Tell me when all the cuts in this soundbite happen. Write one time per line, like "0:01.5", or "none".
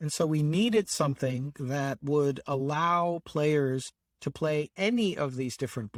none